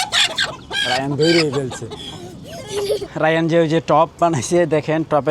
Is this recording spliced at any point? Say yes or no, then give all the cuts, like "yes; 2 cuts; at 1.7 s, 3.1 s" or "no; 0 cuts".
yes; 1 cut; at 3.1 s